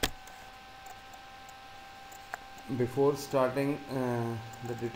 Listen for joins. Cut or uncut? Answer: cut